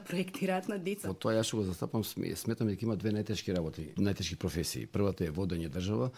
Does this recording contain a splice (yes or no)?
yes